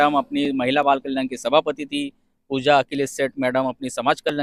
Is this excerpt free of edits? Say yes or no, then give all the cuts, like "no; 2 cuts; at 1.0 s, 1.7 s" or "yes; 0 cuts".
yes; 0 cuts